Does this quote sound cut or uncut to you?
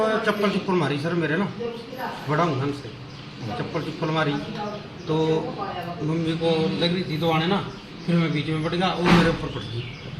uncut